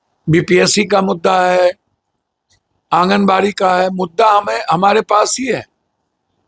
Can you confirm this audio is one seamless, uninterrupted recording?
yes; 0 cuts

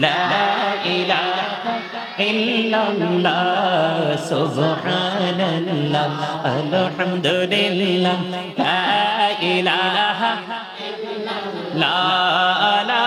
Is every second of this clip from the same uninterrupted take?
yes; 0 cuts

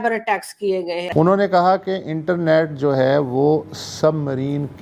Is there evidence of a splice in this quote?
no; 0 cuts

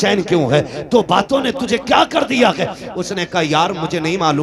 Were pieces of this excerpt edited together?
no; 0 cuts

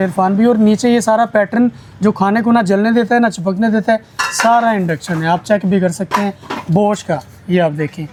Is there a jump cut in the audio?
no; 0 cuts

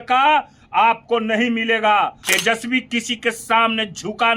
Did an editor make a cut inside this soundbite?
yes; 1 cut; at 2.2 s

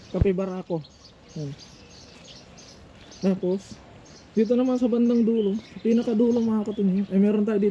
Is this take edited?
no; 0 cuts

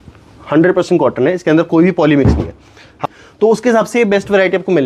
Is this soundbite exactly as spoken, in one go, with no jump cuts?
no; 1 cut; at 3.0 s

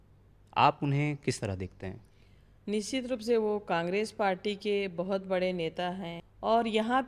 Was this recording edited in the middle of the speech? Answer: no; 0 cuts

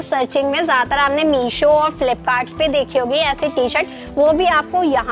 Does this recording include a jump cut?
no; 0 cuts

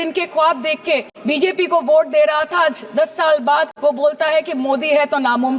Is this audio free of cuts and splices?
no; 2 cuts; at 1.1 s, 3.7 s

